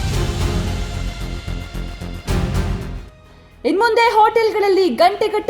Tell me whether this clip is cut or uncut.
cut